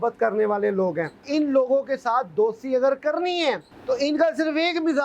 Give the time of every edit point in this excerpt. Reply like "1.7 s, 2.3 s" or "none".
1.2 s, 3.7 s